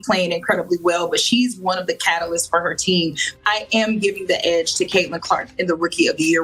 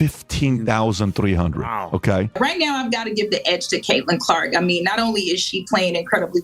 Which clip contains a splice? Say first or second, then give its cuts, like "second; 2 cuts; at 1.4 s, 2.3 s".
second; 1 cut; at 2.3 s